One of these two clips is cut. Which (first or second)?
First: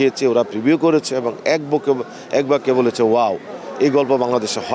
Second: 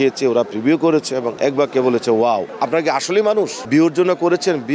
second